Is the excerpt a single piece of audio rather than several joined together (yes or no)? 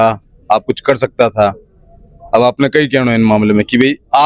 yes